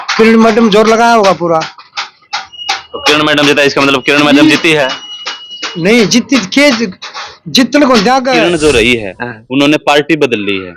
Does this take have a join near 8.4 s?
yes; 1 cut; at 8.4 s

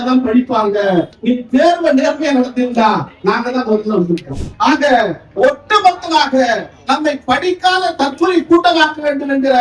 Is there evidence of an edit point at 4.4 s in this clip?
yes; 2 cuts; at 1.1 s, 4.4 s

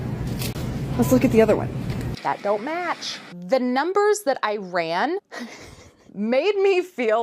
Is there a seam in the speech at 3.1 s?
yes; 1 cut; at 3.1 s

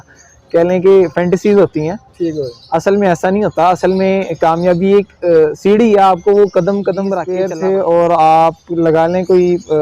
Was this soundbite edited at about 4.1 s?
no; 1 cut; at 7.3 s

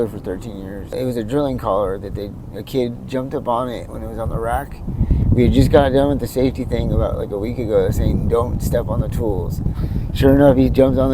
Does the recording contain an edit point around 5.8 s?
no; 1 cut; at 0.9 s

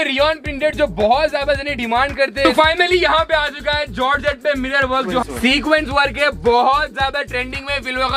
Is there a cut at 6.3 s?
no; 2 cuts; at 2.4 s, 5.0 s

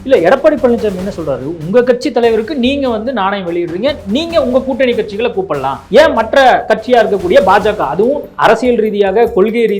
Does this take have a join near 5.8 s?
yes; 3 cuts; at 5.8 s, 6.7 s, 8.3 s

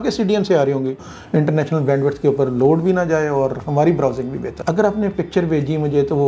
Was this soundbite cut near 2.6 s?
no; 2 cuts; at 1.1 s, 4.5 s

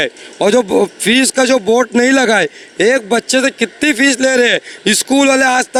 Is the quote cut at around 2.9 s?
no; 0 cuts

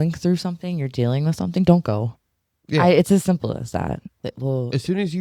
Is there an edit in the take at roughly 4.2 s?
yes; 1 cut; at 4.2 s

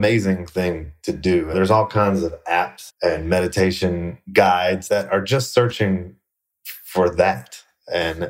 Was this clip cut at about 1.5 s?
yes; 2 cuts; at 1.5 s, 2.8 s

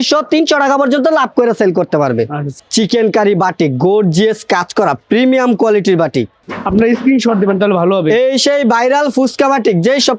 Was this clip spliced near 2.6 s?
yes; 2 cuts; at 2.6 s, 6.4 s

